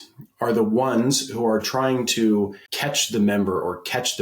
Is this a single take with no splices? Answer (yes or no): no